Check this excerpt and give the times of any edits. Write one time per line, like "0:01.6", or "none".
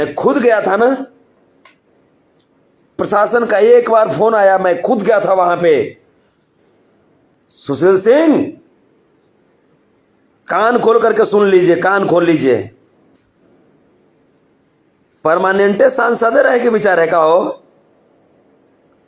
0:07.3